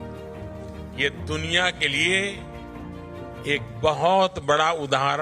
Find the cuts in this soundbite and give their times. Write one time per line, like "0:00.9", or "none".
0:00.9